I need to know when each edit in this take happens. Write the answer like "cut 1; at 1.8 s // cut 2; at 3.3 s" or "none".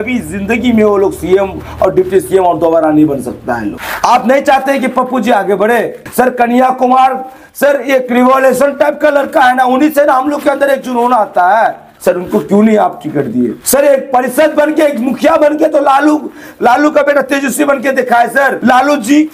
cut 1; at 3.8 s // cut 2; at 6.0 s // cut 3; at 13.6 s